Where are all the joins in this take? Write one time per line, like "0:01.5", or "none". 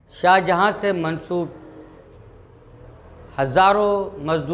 none